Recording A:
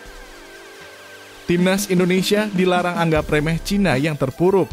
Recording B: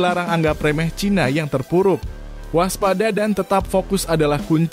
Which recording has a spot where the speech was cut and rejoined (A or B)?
A